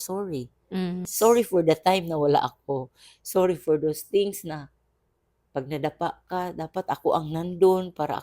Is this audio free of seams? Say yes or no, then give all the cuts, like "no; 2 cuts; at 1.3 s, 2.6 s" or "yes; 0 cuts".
no; 1 cut; at 1.1 s